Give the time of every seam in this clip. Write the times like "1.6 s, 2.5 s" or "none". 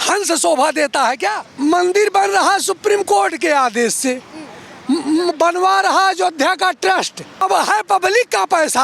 1.4 s, 7.4 s